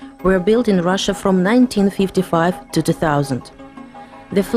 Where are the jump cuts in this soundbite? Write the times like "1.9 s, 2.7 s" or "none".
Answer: 1.1 s